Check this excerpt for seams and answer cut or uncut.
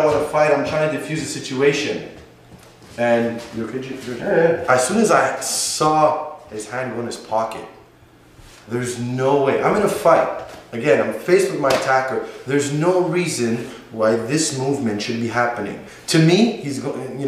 cut